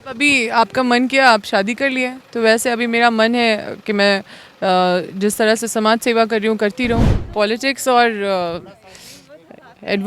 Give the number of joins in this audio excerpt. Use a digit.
1